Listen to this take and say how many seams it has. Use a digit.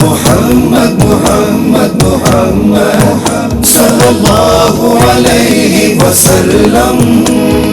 1